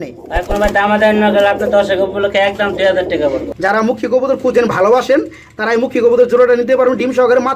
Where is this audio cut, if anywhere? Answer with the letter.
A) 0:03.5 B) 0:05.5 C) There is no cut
A